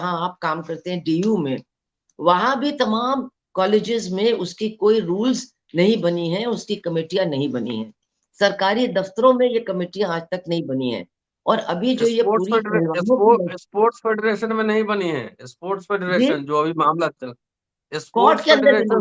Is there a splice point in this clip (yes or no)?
no